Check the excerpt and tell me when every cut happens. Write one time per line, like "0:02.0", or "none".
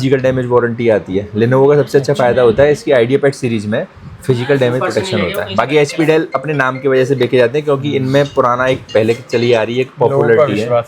none